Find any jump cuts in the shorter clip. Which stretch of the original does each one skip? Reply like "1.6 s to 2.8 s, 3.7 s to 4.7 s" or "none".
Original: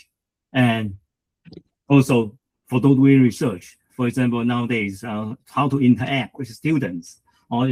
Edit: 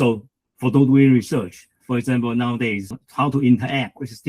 5.0 s to 5.3 s